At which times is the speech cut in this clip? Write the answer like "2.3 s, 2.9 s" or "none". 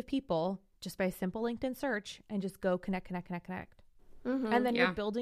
none